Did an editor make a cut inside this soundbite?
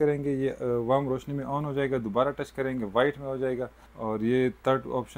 no; 0 cuts

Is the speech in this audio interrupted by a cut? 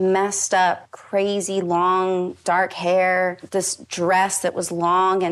yes; 3 cuts; at 0.9 s, 2.3 s, 3.4 s

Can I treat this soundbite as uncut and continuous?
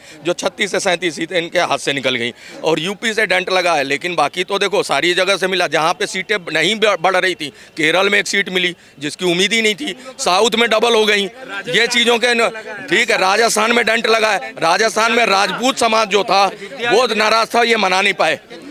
yes; 0 cuts

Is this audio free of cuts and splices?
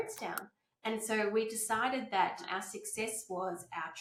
yes; 0 cuts

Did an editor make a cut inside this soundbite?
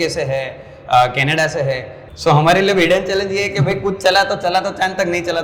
yes; 1 cut; at 1.9 s

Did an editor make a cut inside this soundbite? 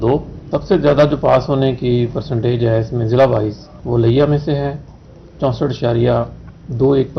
no; 0 cuts

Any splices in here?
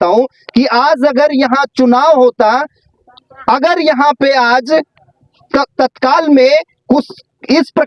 no; 0 cuts

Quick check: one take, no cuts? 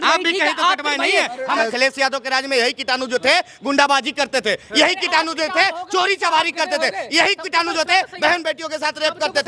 no; 1 cut; at 1.7 s

